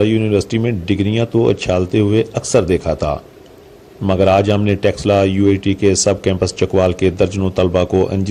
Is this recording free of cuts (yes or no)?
yes